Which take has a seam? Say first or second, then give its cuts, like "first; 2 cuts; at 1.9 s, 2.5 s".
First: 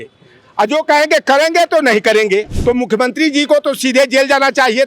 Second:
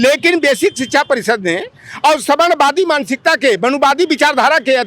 first; 1 cut; at 2.5 s